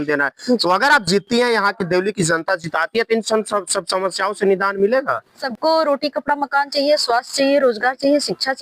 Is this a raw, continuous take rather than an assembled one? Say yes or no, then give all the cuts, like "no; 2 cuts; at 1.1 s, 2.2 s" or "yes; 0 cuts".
no; 1 cut; at 5.4 s